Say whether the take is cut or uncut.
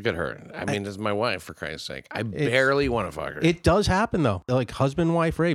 cut